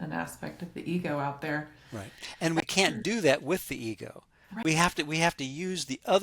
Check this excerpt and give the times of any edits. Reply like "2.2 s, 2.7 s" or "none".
2.6 s, 4.6 s